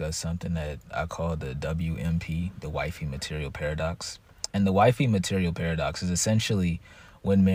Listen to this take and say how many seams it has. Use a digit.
0